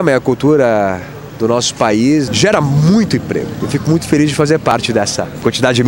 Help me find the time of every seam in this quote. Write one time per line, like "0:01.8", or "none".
0:02.3
0:03.6
0:04.7

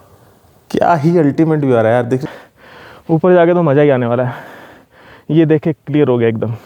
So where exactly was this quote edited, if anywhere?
0:02.2

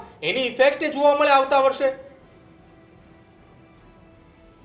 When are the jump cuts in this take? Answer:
none

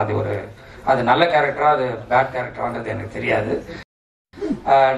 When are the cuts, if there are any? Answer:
0:04.0

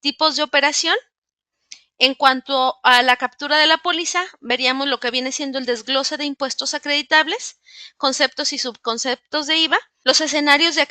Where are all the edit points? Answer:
0:09.9

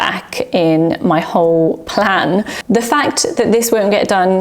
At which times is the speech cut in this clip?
0:02.5

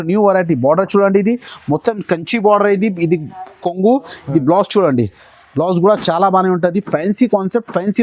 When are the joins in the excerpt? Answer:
none

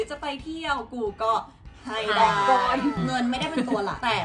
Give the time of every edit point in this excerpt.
0:03.0

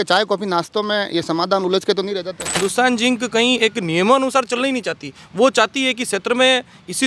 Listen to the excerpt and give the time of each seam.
0:02.6

